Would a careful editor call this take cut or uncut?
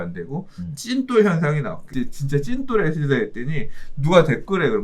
cut